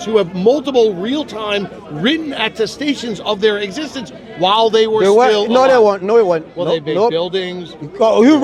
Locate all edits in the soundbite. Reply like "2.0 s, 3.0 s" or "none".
none

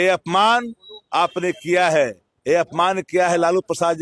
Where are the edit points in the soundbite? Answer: none

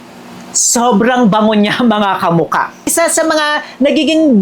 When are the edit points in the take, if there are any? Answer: 2.9 s

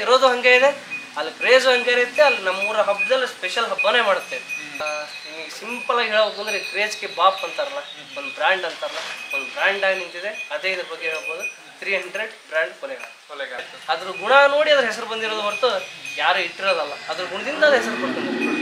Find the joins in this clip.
4.8 s, 13.7 s

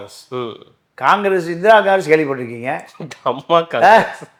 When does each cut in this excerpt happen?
none

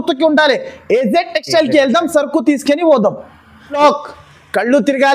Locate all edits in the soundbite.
3.8 s

